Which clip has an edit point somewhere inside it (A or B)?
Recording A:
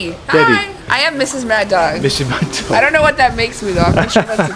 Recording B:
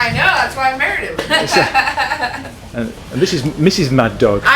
A